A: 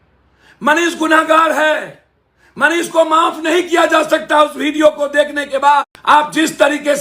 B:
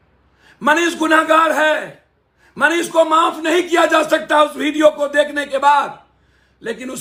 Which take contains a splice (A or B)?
A